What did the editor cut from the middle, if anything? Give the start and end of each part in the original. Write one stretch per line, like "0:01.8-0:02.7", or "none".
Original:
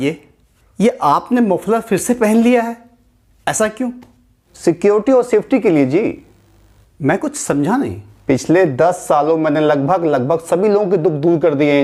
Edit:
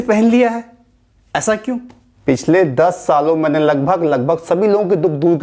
0:04.2-0:08.1